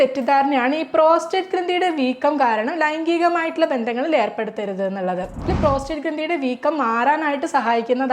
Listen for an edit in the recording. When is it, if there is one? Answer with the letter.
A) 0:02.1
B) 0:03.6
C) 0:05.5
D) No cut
C